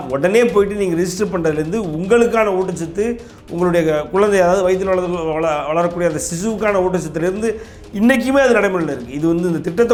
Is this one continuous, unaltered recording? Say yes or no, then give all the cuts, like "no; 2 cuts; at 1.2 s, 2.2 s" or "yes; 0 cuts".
yes; 0 cuts